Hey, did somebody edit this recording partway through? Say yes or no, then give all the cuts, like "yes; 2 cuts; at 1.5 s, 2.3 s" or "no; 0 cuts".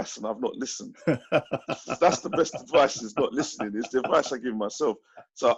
no; 0 cuts